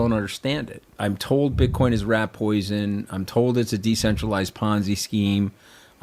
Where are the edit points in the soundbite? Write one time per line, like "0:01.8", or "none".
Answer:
0:00.9